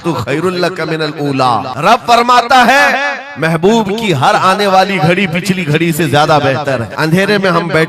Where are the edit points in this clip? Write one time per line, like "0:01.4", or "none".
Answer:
0:01.7
0:06.9